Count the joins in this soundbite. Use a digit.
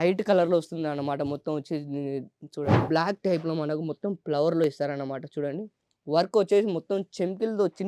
1